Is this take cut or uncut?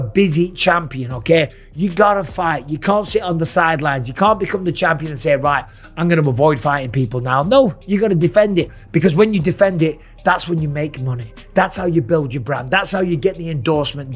uncut